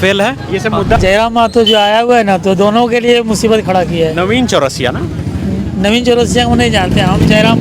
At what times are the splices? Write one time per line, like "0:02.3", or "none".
0:01.0